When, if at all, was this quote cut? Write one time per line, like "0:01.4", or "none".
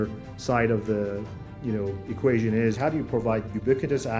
0:02.8